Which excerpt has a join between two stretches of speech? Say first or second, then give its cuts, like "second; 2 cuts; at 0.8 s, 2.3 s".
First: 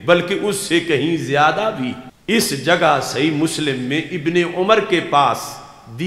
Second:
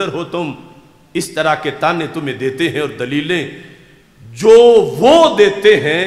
first; 1 cut; at 2.1 s